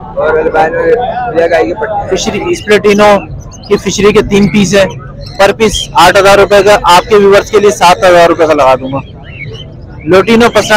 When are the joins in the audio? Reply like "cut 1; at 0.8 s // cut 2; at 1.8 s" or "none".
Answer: cut 1; at 2.1 s